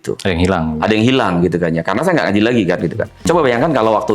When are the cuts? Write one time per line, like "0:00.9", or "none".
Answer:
0:03.2